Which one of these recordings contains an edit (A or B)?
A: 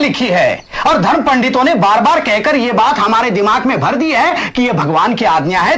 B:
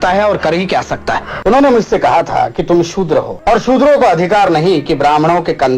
B